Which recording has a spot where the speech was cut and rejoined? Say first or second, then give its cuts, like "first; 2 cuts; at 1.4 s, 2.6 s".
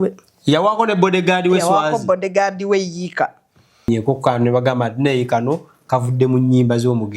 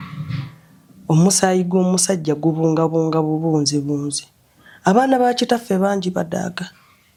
first; 1 cut; at 3.9 s